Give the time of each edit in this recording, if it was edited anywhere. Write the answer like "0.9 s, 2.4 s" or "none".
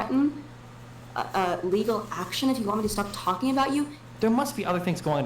4.0 s